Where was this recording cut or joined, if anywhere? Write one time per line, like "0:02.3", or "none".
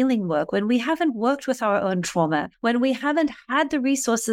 0:02.5